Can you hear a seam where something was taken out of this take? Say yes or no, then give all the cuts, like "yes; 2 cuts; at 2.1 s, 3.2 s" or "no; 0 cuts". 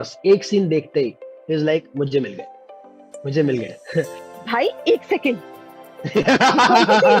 yes; 1 cut; at 4.2 s